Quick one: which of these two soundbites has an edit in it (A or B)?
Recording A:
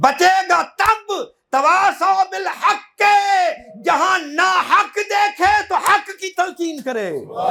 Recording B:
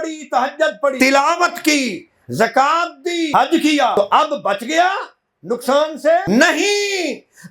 B